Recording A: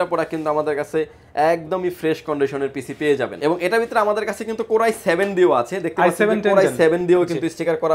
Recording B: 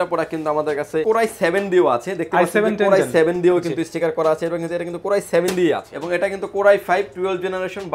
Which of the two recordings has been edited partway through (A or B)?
B